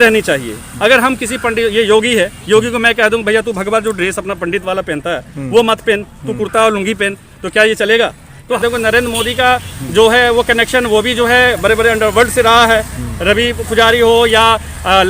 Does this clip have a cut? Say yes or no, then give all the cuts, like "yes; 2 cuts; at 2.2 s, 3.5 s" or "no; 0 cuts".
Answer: yes; 1 cut; at 8.6 s